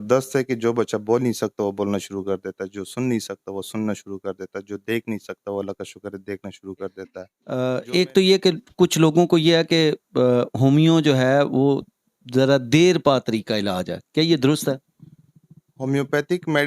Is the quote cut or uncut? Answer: cut